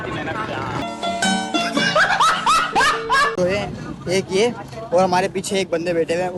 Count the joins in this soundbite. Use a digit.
1